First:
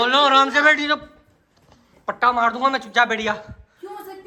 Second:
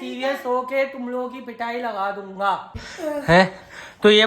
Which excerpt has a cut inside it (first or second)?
second